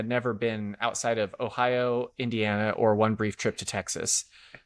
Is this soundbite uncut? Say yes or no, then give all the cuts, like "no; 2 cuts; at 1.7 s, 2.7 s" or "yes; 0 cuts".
yes; 0 cuts